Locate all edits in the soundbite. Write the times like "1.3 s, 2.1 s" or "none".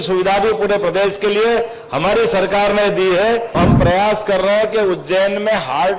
3.6 s

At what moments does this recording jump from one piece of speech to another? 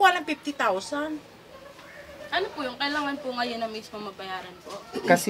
none

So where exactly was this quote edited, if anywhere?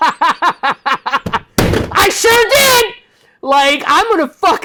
none

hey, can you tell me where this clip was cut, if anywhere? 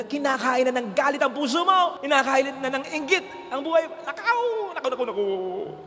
none

